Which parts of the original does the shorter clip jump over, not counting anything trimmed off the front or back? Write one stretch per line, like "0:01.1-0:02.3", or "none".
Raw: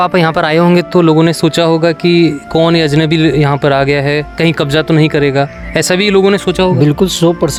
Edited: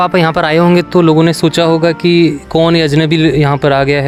none